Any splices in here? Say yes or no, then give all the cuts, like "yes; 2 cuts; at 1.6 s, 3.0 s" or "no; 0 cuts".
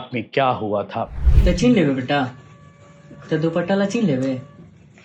yes; 1 cut; at 1.2 s